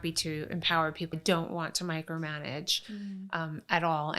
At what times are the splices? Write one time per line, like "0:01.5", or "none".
0:01.1